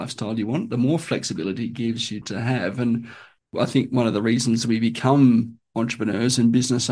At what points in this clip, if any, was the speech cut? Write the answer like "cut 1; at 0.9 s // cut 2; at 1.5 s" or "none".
cut 1; at 2.2 s // cut 2; at 3.5 s